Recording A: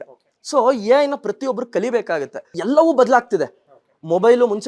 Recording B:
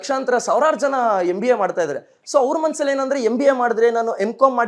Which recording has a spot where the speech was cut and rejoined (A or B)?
A